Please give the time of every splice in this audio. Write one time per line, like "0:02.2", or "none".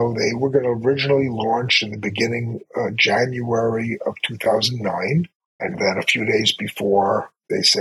0:02.6
0:05.4